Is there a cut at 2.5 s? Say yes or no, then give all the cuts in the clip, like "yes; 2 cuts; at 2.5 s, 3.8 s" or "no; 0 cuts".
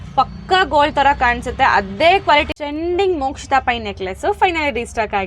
yes; 1 cut; at 2.5 s